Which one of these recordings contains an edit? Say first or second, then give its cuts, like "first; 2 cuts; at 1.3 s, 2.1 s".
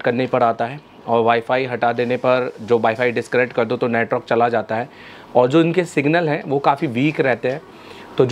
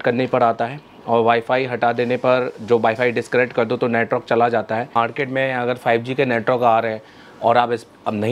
second; 1 cut; at 5.0 s